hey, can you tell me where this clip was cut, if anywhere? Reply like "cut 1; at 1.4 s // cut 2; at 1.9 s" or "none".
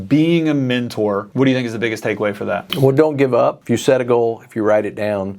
cut 1; at 1.3 s // cut 2; at 2.7 s // cut 3; at 3.6 s